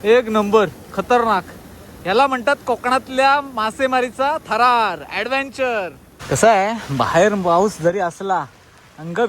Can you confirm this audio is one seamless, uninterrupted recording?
no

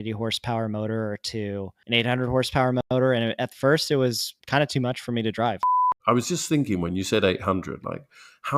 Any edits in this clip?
yes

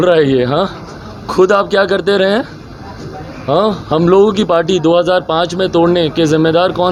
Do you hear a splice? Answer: no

